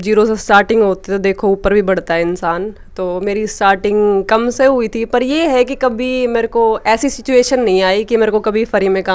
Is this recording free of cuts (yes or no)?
yes